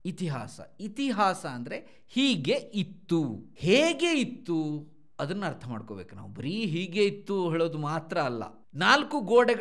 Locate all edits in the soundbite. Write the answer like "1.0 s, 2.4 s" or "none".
3.4 s, 8.6 s